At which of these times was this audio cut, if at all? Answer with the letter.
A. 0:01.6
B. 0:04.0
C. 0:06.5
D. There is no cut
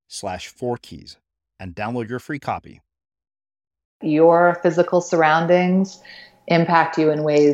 B